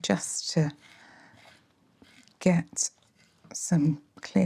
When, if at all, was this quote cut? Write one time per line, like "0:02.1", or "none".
none